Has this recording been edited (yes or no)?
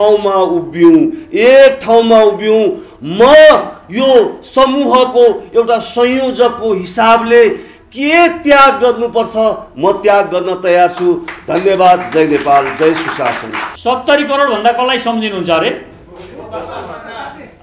no